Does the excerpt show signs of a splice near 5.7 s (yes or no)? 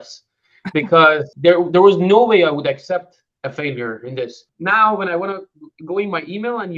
no